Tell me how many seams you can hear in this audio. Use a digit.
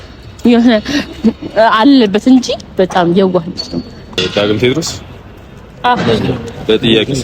1